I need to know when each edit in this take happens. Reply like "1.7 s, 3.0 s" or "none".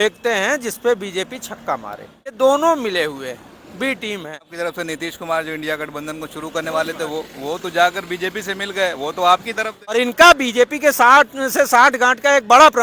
2.4 s, 4.5 s, 9.9 s